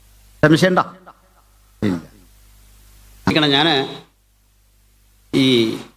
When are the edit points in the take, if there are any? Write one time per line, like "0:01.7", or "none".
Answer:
0:03.3